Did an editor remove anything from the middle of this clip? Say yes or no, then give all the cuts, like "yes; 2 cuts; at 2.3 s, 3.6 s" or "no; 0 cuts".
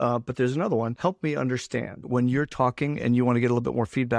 yes; 2 cuts; at 0.9 s, 2.0 s